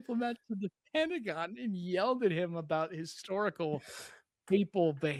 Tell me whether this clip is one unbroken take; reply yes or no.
yes